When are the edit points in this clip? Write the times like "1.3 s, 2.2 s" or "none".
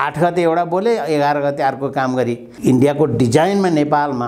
2.4 s